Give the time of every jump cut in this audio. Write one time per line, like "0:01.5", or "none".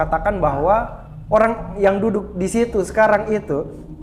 none